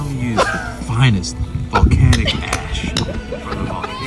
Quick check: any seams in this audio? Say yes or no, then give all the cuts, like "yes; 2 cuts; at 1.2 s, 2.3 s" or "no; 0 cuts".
no; 0 cuts